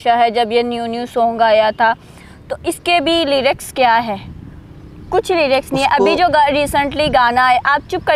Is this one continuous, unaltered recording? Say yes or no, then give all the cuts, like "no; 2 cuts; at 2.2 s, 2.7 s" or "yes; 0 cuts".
yes; 0 cuts